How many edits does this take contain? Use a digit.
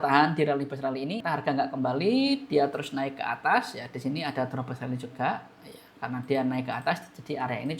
1